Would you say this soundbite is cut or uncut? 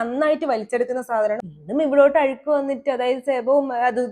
cut